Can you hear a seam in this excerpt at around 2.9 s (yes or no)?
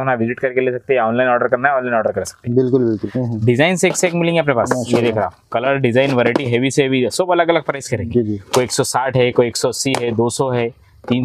yes